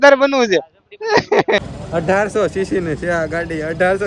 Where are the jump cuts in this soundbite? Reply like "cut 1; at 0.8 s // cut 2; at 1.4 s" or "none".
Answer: cut 1; at 1.6 s